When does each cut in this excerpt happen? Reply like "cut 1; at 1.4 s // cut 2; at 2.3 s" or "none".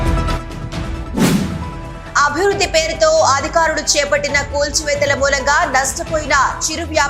cut 1; at 1.4 s